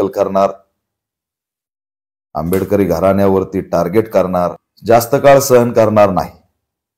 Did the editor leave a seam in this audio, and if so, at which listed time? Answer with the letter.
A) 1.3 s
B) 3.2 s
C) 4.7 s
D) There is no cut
C